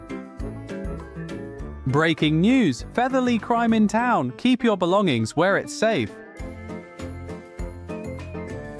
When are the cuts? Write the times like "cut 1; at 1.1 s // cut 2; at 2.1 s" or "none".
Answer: none

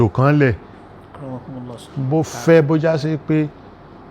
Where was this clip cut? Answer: cut 1; at 1.9 s

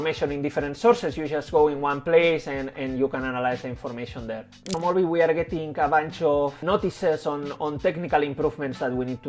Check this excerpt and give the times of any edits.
cut 1; at 4.7 s // cut 2; at 6.6 s

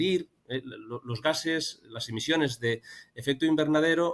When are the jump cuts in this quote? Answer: none

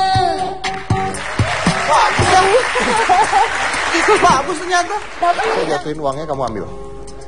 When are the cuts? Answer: cut 1; at 5.6 s

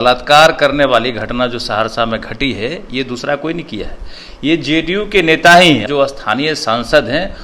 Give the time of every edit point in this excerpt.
cut 1; at 5.8 s

